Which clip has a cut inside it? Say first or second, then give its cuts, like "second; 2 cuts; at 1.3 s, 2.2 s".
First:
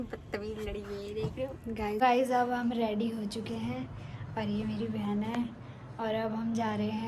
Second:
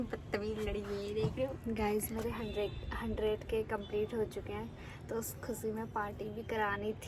first; 1 cut; at 2.0 s